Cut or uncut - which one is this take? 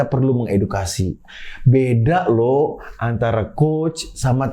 uncut